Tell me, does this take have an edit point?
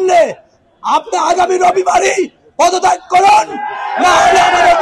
no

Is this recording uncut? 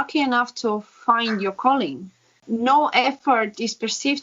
no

